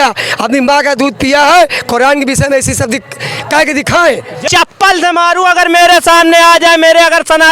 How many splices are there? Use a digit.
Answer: 1